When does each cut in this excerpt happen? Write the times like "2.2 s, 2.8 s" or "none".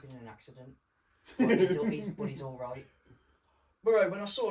none